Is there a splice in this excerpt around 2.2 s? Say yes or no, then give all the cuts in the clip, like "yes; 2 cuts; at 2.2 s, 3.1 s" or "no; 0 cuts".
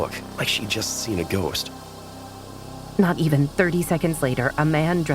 yes; 1 cut; at 2.2 s